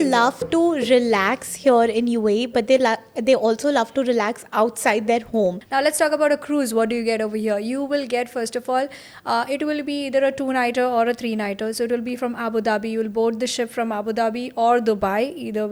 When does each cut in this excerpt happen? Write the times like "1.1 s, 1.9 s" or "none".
5.6 s